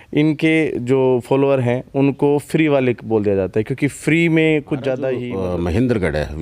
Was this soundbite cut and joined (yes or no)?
yes